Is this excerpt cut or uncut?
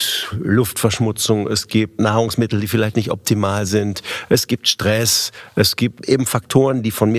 cut